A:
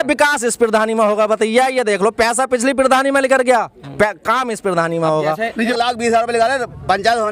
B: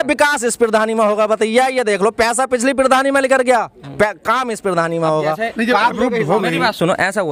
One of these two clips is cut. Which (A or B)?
A